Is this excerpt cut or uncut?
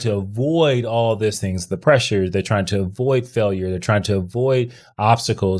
uncut